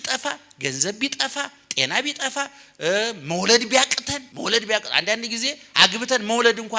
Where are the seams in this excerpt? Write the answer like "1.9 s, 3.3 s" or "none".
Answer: 4.2 s